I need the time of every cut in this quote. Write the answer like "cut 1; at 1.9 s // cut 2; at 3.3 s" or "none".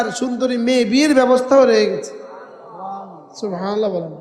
none